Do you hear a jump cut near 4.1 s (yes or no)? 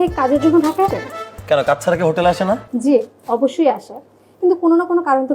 no